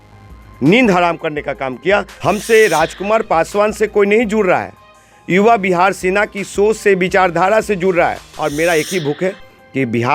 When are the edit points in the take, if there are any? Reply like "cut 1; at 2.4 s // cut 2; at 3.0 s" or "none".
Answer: cut 1; at 2.1 s // cut 2; at 8.3 s